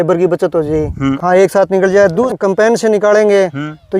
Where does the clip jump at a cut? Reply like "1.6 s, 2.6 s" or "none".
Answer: 1.1 s, 2.3 s